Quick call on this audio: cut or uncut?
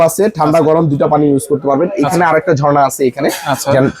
uncut